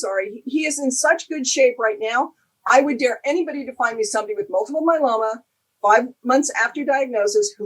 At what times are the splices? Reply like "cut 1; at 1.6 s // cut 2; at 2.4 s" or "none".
none